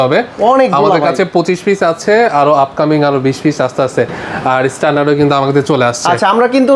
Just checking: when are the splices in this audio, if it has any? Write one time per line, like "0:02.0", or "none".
none